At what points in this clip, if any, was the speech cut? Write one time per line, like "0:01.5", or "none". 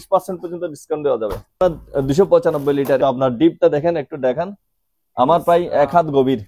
0:01.6
0:03.0